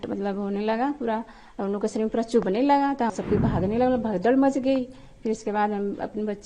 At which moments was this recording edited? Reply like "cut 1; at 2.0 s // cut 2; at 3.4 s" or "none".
cut 1; at 3.1 s